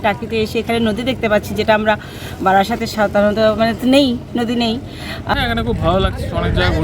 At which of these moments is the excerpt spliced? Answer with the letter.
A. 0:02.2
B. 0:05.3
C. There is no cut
B